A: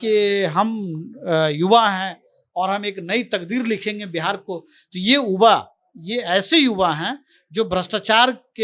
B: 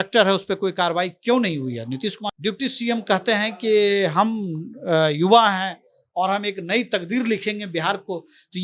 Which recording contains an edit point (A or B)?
B